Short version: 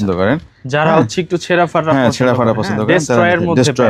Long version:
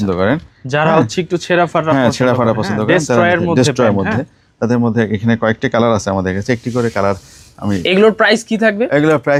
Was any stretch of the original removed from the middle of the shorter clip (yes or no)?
no